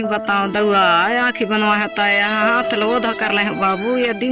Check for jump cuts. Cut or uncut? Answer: uncut